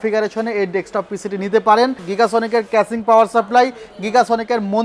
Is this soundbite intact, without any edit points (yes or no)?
no